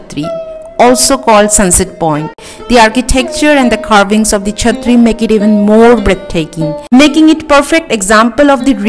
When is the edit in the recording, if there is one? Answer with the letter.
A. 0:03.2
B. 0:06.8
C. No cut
B